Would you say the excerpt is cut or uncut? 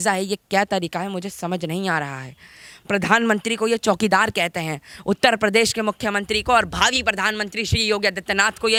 uncut